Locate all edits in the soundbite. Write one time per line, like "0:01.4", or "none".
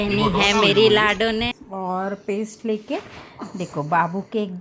0:01.5